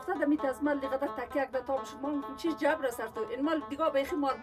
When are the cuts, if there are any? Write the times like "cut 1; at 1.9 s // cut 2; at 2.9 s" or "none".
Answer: none